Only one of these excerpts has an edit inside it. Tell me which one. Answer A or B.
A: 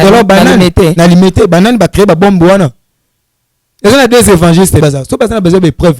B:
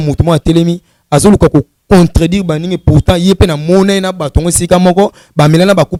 A